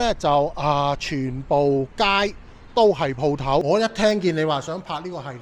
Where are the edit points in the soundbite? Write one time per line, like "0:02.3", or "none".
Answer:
0:03.6